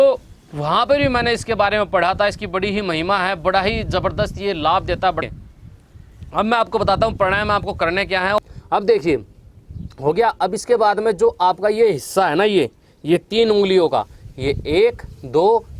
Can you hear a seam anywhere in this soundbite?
yes; 2 cuts; at 5.2 s, 8.4 s

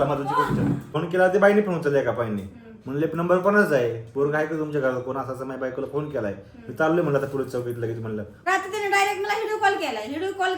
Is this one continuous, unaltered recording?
no; 2 cuts; at 0.9 s, 8.3 s

